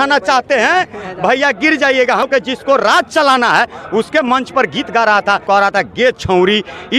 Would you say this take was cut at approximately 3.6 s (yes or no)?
no